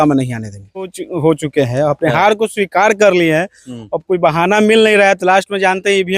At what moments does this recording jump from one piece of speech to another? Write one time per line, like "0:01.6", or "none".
0:01.0